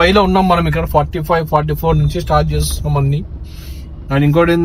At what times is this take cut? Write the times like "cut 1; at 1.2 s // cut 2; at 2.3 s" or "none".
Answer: none